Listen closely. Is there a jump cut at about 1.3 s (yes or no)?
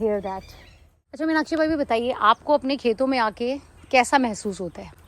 yes